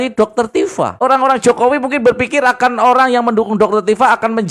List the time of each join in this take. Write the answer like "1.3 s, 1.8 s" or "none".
0.9 s